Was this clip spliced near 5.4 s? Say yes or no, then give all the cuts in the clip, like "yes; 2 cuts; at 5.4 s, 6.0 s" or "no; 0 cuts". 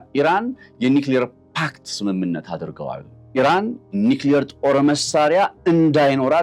no; 2 cuts; at 3.1 s, 3.9 s